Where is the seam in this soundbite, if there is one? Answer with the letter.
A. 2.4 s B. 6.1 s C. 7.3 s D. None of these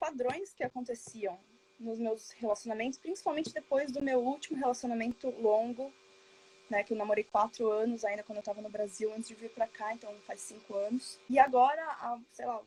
D